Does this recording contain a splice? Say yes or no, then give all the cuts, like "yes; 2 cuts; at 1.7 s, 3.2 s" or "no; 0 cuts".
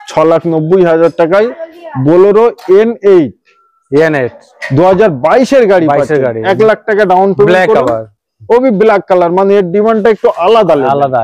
no; 0 cuts